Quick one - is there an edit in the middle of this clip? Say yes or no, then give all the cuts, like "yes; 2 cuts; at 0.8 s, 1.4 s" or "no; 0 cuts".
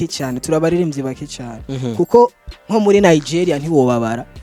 no; 0 cuts